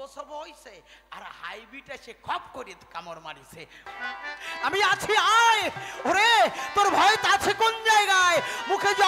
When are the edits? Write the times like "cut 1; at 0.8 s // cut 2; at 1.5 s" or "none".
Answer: cut 1; at 3.9 s